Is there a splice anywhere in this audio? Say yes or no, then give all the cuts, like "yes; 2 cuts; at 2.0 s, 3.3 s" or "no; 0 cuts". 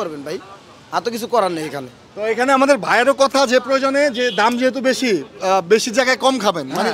no; 0 cuts